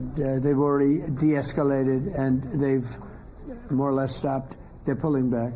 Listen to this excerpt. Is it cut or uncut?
uncut